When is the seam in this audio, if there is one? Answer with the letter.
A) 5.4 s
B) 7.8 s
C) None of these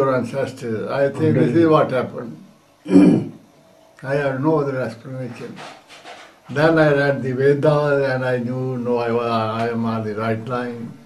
A